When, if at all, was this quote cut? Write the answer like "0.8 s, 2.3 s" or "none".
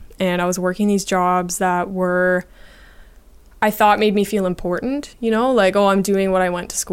none